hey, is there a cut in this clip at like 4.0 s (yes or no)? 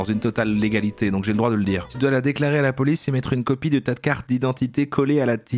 no